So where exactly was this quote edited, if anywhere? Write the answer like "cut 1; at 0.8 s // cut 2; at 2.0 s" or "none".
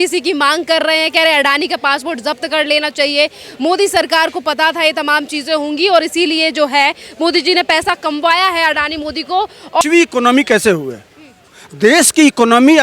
cut 1; at 9.8 s